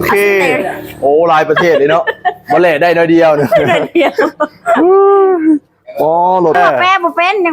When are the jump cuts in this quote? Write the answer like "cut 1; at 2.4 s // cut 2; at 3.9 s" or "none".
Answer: cut 1; at 6.5 s